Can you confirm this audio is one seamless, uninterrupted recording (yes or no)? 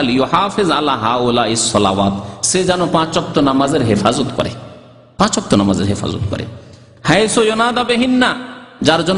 yes